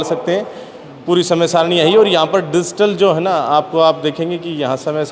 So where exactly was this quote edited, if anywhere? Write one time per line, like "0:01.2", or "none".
none